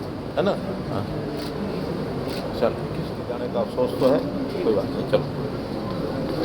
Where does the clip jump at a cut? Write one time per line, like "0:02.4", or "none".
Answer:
0:03.4